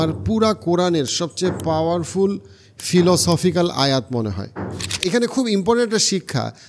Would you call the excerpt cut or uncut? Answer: cut